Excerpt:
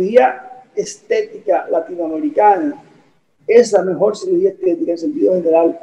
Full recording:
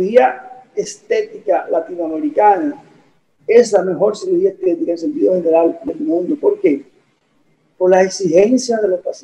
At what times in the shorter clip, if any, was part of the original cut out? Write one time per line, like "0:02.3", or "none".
none

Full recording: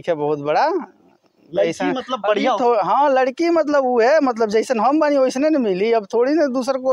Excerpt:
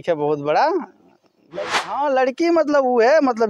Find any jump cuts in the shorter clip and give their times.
0:01.8

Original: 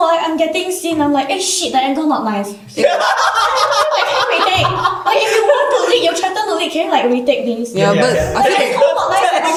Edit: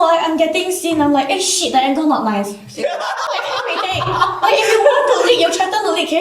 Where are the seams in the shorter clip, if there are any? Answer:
0:03.3

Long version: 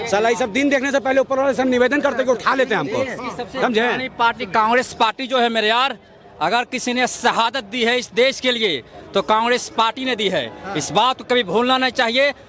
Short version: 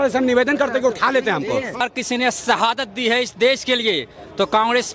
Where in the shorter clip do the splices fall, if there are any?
0:01.8

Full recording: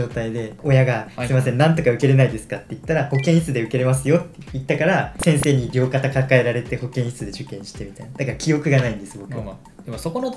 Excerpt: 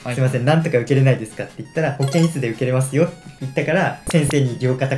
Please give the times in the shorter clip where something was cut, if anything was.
none

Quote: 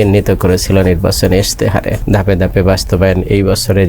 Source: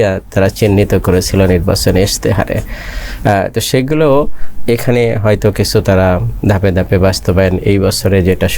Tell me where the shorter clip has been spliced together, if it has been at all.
0:02.0

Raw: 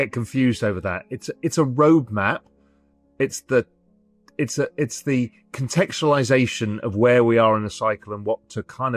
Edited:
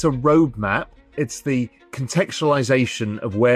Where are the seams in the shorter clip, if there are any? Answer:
0:01.1

